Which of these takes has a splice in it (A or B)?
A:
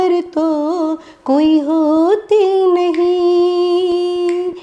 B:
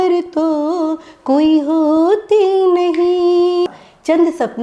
B